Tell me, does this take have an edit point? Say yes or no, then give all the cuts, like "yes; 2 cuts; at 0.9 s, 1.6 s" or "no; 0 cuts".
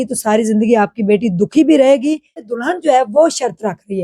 yes; 1 cut; at 2.4 s